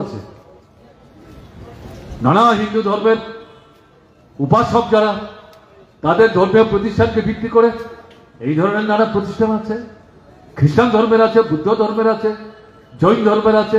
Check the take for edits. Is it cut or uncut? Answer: uncut